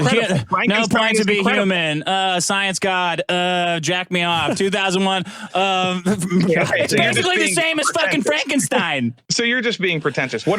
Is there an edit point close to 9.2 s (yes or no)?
yes